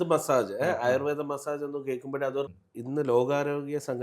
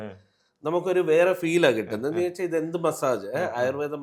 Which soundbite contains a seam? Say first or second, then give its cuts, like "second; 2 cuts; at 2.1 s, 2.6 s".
first; 1 cut; at 2.5 s